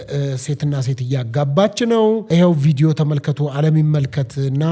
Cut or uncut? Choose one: cut